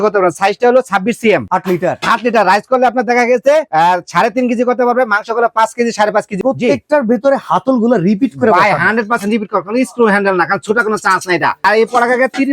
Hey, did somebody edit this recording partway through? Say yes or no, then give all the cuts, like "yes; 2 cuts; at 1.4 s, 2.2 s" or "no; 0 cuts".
yes; 3 cuts; at 1.5 s, 6.4 s, 11.6 s